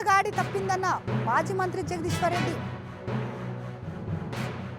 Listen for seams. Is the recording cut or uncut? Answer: uncut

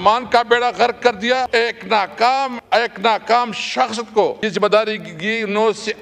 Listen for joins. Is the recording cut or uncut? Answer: cut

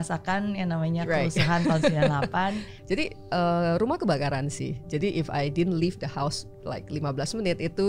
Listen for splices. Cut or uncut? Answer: cut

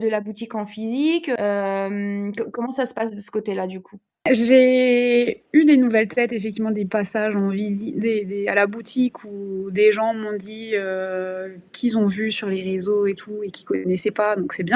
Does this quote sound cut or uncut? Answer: uncut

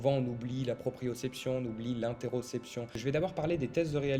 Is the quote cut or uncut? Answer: cut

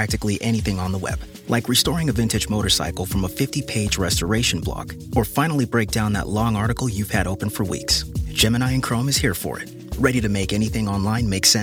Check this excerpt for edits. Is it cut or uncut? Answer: uncut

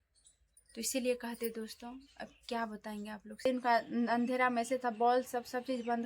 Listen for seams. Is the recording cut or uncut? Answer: cut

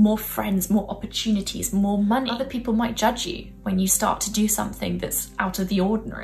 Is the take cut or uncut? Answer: cut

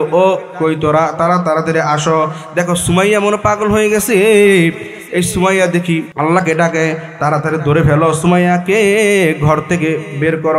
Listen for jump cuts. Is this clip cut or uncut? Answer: cut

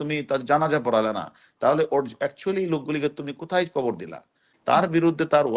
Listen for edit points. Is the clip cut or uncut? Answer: cut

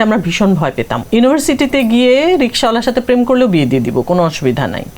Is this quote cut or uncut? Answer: cut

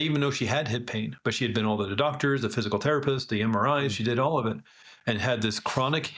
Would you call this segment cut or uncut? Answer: uncut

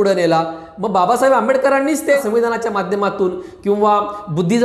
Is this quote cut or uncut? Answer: cut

